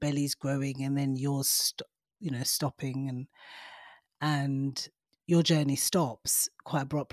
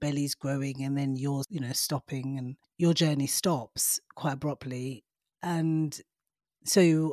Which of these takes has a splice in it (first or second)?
second